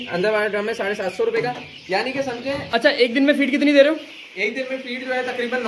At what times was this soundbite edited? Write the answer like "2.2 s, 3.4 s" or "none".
2.7 s